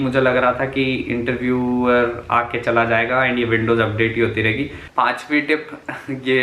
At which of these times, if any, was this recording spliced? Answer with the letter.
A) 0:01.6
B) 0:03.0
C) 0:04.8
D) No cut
C